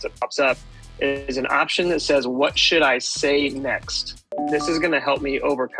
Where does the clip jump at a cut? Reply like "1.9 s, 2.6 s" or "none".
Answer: 4.3 s